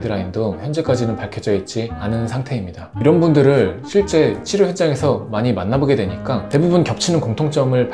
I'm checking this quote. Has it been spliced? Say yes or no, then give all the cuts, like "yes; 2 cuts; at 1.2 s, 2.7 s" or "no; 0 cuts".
yes; 1 cut; at 2.8 s